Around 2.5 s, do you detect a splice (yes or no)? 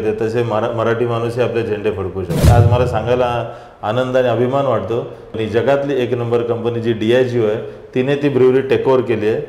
yes